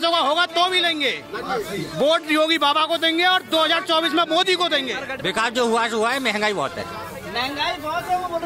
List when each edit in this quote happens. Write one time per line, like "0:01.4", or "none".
0:05.0

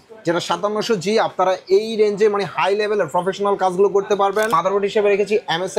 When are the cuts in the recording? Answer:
0:04.5

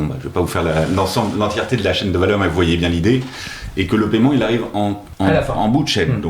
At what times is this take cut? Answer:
0:05.1

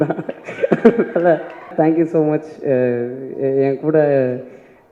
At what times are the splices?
0:01.7

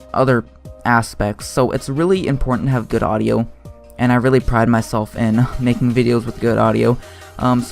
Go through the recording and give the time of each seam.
0:04.1

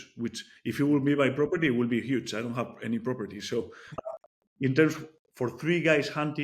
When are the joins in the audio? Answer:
0:04.0

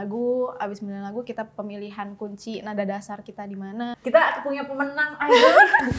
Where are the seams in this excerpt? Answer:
0:03.9

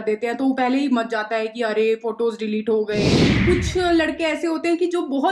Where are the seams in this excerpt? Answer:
0:03.3

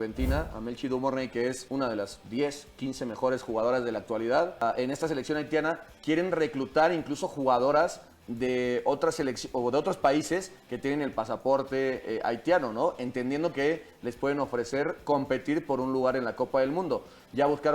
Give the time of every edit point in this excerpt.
0:01.6
0:04.6

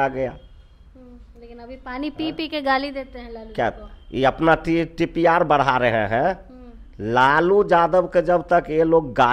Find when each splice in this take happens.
none

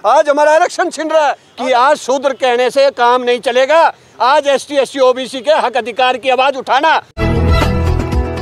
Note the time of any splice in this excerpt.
0:01.5
0:07.1

